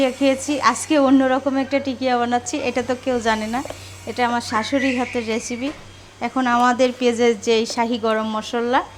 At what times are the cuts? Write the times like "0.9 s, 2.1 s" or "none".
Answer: none